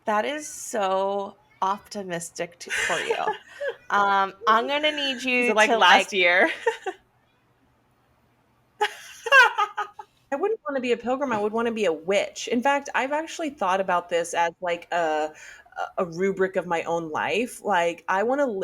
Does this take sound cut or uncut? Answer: cut